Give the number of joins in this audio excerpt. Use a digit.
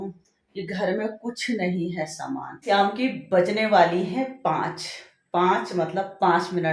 1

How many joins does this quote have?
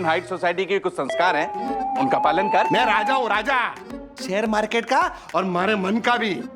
1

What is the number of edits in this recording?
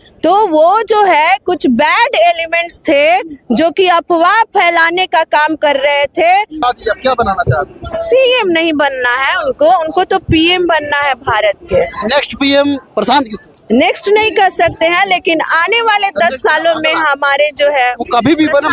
1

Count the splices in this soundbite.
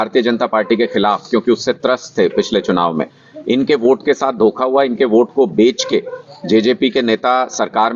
0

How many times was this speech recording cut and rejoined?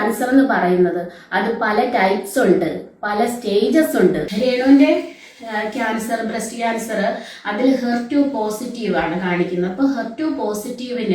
1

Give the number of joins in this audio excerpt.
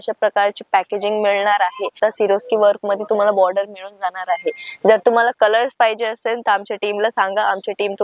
1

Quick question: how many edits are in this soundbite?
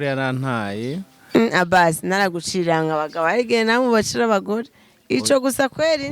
1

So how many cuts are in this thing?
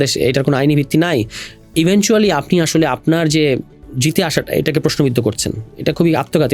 0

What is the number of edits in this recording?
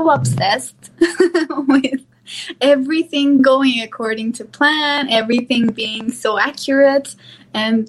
1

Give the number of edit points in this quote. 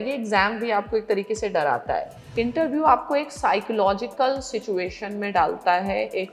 1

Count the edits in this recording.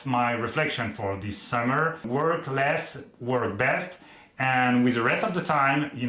1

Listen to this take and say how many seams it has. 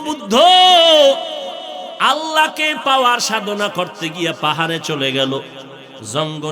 0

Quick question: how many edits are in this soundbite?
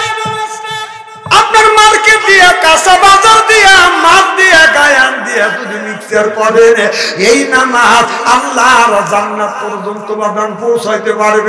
0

